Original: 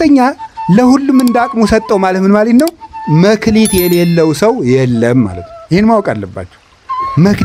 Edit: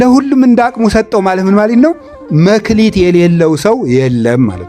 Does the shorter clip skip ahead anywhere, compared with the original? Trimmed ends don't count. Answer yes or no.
no